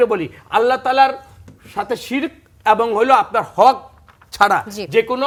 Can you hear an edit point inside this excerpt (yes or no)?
no